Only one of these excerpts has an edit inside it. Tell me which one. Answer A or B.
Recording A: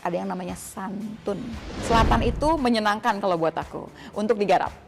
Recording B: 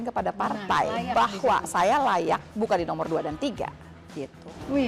A